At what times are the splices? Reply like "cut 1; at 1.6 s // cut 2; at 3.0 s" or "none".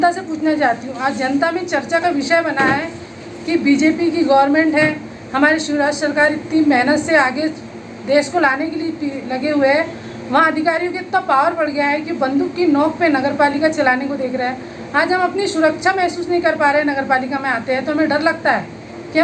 none